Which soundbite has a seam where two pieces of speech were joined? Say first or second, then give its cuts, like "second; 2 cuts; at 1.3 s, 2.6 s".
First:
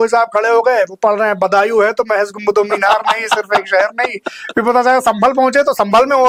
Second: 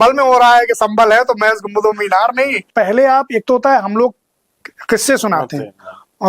second; 1 cut; at 2.7 s